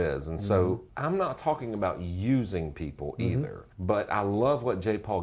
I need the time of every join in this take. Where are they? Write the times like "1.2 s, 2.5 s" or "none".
0.9 s, 3.6 s